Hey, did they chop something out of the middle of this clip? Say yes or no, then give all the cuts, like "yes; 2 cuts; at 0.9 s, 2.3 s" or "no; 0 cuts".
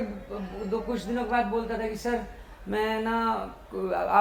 no; 0 cuts